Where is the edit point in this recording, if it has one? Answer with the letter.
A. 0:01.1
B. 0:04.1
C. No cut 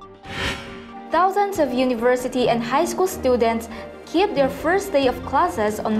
A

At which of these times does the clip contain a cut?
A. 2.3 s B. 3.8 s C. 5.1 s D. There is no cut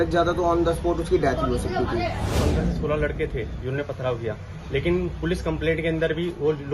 A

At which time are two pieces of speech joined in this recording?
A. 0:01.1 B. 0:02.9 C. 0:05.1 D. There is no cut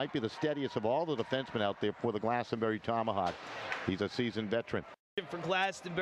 C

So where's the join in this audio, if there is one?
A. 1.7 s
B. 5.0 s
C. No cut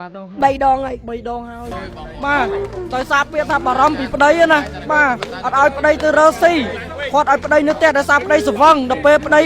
A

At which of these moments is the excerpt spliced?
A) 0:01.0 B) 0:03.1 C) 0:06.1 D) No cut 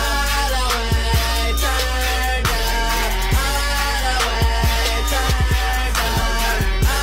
D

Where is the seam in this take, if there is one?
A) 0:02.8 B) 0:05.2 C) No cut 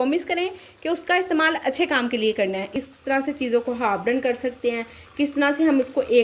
A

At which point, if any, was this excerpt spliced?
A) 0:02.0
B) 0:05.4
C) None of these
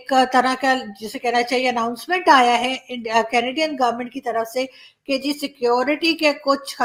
C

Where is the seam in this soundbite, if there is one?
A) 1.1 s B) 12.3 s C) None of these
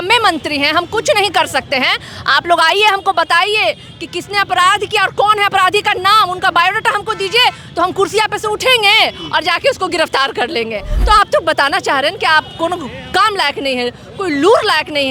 C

